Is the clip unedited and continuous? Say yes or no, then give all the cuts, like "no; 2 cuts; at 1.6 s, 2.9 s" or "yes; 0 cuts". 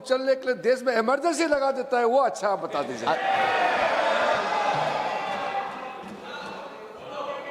yes; 0 cuts